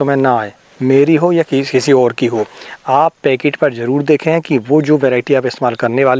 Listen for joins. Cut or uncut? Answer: uncut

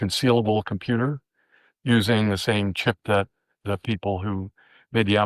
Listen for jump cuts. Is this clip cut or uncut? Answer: uncut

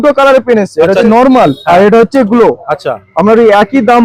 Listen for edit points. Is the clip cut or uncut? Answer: cut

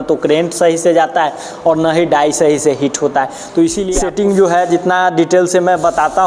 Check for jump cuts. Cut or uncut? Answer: cut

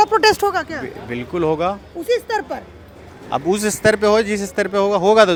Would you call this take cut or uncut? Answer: uncut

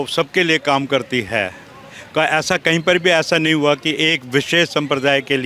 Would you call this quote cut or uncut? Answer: uncut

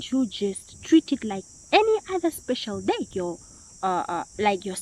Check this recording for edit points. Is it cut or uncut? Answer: cut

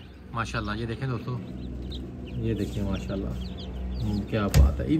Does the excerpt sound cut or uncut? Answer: uncut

